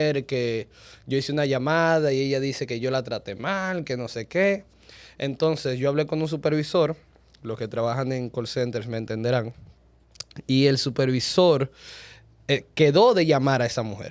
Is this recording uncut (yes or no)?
yes